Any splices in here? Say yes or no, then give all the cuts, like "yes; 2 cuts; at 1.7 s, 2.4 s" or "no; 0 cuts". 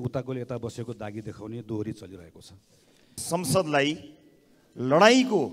yes; 1 cut; at 3.1 s